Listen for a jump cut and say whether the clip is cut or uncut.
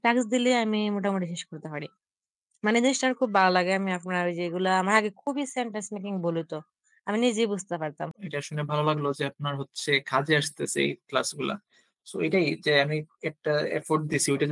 cut